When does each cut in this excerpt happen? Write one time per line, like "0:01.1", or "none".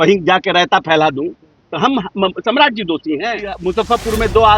0:03.6